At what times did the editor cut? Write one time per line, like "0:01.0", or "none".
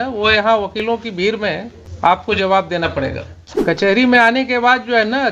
0:01.8
0:03.8